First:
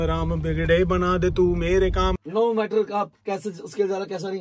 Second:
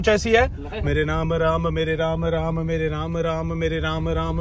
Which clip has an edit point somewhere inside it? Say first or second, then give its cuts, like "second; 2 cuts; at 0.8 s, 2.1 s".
first; 1 cut; at 2.1 s